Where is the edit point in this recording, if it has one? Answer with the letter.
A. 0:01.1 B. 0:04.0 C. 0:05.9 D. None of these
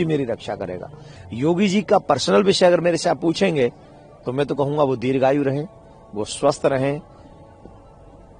A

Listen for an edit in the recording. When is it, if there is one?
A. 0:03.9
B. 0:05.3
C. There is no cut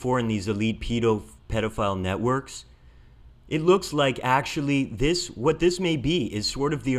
A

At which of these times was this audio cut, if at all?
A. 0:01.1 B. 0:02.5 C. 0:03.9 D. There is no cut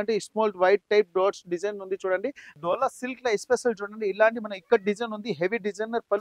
B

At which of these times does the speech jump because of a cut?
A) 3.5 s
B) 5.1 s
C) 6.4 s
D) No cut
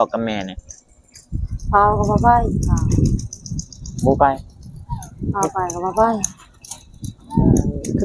D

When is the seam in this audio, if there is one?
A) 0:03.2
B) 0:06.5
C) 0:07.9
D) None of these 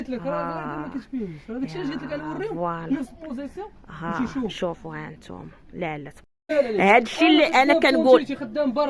B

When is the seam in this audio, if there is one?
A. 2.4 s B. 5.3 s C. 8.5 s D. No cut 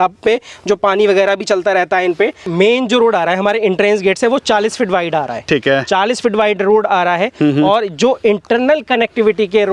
A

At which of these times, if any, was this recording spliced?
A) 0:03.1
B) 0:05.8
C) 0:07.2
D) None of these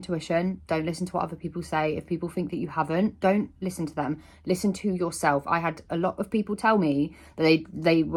D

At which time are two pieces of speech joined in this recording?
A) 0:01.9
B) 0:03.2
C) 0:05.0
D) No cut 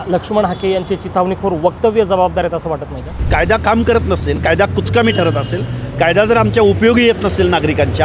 B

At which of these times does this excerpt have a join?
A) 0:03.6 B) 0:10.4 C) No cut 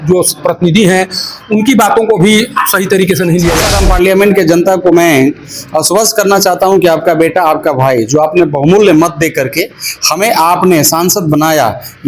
A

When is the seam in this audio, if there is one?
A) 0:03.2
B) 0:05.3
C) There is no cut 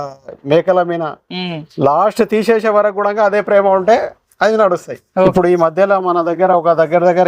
B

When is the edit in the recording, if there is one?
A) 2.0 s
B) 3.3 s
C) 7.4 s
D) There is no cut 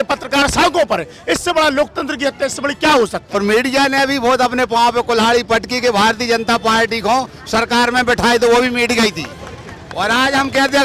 B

